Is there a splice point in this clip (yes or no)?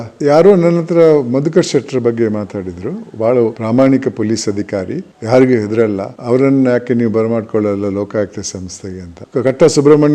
yes